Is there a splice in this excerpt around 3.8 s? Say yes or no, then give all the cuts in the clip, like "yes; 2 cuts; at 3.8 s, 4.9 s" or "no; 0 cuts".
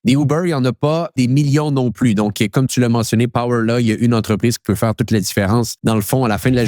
no; 2 cuts; at 1.1 s, 5.7 s